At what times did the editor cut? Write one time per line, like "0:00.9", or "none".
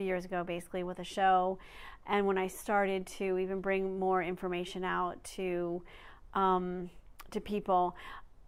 none